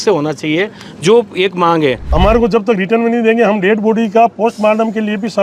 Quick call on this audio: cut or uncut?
cut